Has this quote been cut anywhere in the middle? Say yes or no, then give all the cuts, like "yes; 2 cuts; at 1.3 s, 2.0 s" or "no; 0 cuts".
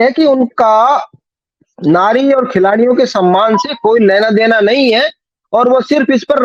no; 0 cuts